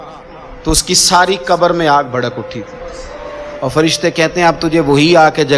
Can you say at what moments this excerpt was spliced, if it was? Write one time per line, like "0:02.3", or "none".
0:03.5